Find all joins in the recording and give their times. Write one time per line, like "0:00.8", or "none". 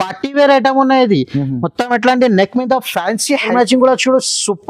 0:03.5